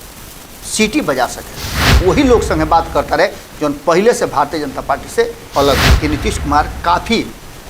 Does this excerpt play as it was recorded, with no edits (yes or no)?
no